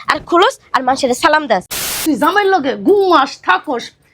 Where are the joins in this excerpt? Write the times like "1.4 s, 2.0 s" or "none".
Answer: 1.8 s